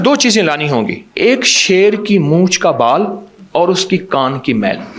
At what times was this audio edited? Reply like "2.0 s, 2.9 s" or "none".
1.0 s